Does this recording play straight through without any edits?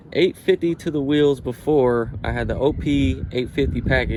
yes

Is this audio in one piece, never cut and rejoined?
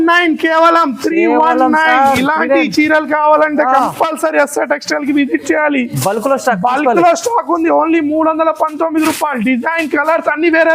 yes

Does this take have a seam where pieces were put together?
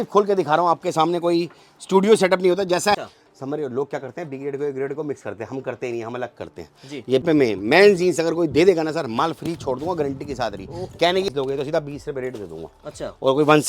yes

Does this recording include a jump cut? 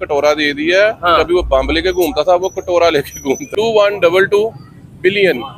yes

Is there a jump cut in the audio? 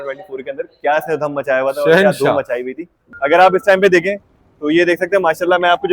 yes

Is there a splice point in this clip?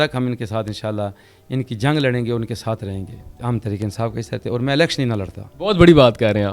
yes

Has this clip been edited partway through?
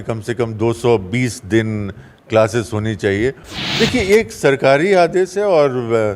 yes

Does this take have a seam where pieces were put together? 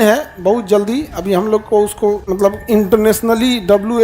yes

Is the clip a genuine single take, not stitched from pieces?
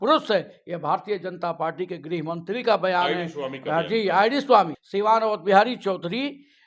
no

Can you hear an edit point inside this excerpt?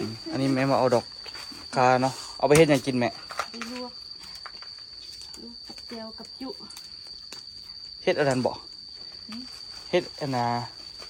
no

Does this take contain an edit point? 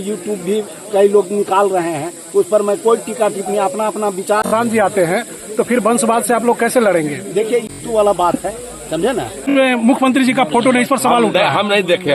yes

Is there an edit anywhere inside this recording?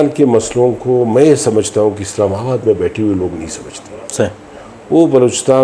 no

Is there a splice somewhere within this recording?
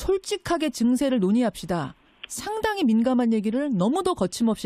no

